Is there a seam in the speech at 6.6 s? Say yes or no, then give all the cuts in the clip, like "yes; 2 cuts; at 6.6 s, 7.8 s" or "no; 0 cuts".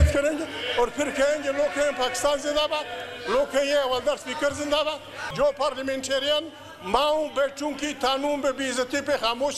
no; 1 cut; at 5.3 s